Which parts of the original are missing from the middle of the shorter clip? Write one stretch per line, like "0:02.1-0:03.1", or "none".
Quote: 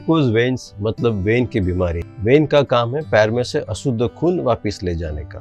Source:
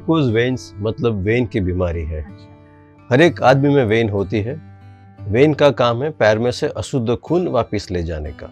0:02.1-0:05.1